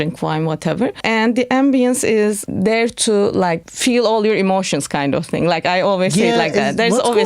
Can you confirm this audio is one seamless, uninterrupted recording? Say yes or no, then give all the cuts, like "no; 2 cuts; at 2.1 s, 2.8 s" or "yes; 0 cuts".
no; 3 cuts; at 1.0 s, 2.4 s, 3.7 s